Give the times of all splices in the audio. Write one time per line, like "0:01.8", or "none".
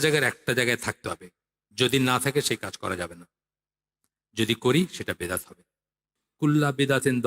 0:06.2